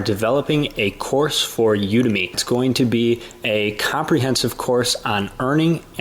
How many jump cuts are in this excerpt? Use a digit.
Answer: 1